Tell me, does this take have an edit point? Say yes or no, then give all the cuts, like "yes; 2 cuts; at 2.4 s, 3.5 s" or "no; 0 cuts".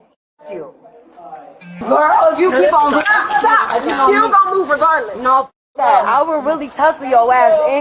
yes; 1 cut; at 1.8 s